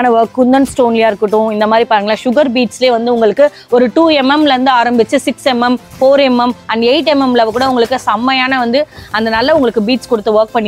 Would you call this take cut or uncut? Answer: uncut